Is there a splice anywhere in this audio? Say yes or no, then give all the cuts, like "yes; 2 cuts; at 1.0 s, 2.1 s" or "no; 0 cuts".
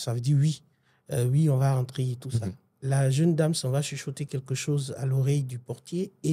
yes; 1 cut; at 2.7 s